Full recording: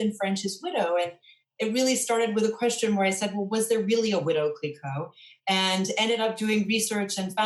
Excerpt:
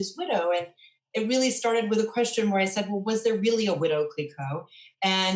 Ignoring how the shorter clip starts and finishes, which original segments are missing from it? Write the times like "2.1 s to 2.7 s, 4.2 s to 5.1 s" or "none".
none